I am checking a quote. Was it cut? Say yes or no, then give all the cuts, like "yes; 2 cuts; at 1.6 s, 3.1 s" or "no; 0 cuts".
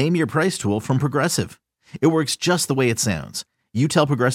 no; 0 cuts